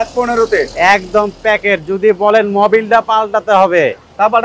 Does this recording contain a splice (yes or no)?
no